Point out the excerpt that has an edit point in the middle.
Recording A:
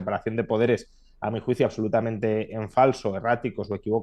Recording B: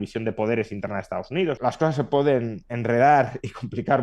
B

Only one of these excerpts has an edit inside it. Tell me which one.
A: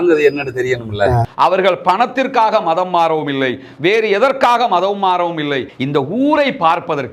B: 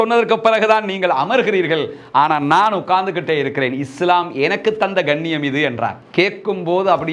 A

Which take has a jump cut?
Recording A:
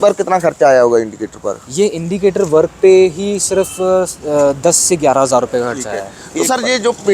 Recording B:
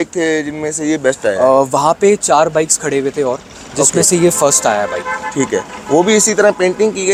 A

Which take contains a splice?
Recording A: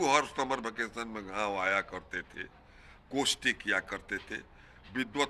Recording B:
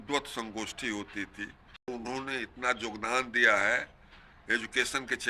B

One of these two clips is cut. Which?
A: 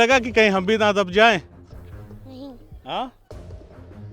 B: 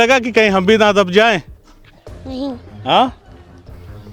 B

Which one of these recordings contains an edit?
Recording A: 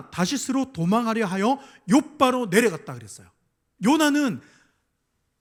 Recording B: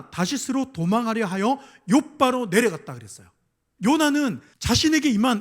B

